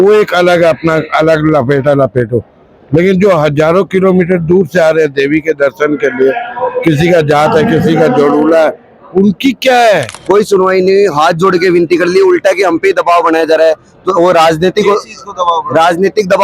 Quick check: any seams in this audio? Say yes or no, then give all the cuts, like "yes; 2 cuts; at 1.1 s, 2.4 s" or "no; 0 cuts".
yes; 1 cut; at 10.1 s